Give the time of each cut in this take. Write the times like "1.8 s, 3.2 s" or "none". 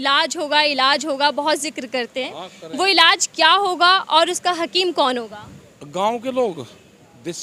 none